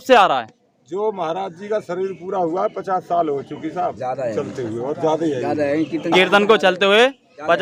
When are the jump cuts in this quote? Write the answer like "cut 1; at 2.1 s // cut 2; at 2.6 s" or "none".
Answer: none